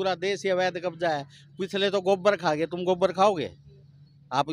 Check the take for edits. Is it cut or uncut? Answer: uncut